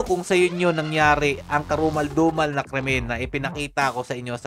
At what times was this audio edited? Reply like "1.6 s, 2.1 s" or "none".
none